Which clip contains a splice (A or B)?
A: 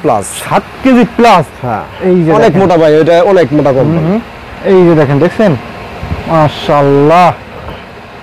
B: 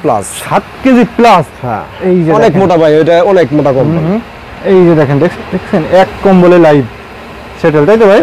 B